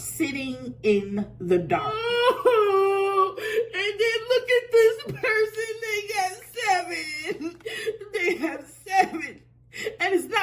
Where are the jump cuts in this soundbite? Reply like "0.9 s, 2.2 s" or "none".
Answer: 2.0 s